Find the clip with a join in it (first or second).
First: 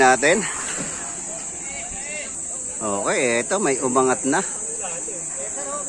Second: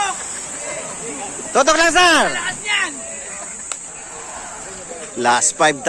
first